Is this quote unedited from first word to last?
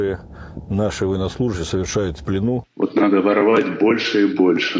no; 1 cut; at 2.7 s

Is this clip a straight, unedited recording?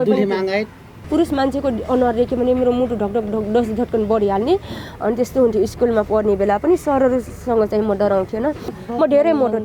no; 2 cuts; at 1.1 s, 8.8 s

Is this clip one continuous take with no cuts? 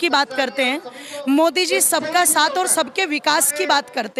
yes; 0 cuts

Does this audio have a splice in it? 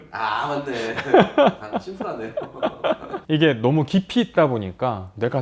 yes; 1 cut; at 3.1 s

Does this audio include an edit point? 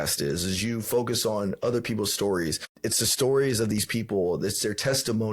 yes; 1 cut; at 2.7 s

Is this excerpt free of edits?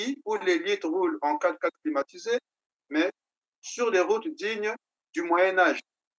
yes; 0 cuts

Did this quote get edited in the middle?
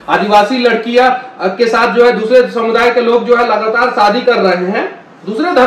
no; 0 cuts

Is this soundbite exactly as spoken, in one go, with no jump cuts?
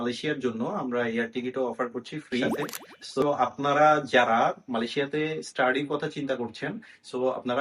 no; 1 cut; at 3.2 s

